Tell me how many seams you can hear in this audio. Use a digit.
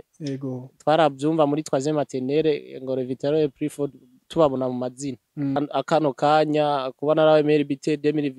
1